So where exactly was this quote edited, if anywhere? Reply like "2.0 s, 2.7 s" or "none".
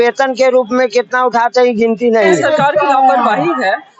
2.4 s